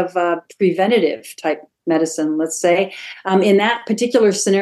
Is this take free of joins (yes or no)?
yes